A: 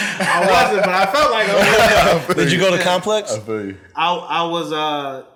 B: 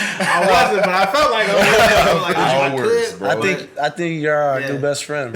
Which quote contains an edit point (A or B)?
B